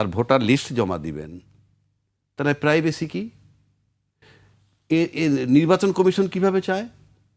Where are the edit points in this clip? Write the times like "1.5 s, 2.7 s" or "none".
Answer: none